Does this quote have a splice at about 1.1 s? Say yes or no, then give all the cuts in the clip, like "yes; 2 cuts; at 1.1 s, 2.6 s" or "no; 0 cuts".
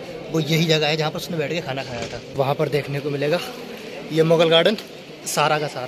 no; 1 cut; at 2.4 s